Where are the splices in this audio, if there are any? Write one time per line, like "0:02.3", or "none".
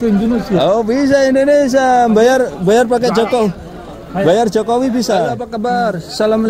0:05.4